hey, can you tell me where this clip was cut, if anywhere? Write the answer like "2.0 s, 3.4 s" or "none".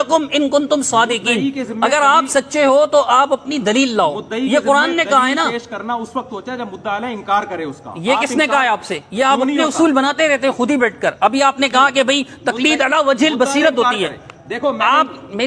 none